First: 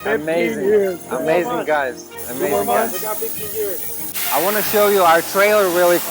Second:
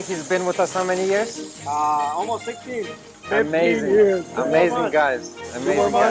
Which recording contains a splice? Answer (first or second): first